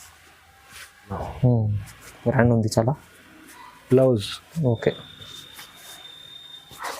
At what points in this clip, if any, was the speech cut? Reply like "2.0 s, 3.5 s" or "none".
1.1 s